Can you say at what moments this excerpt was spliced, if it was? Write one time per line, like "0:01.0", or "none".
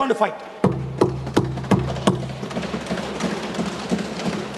none